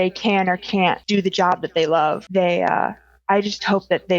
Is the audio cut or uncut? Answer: cut